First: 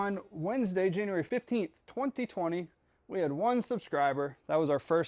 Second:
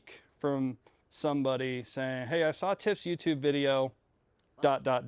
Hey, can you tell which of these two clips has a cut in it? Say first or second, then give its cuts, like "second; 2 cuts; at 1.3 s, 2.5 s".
first; 1 cut; at 1.3 s